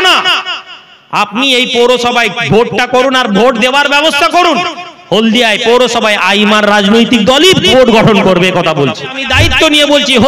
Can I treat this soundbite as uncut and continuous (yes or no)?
no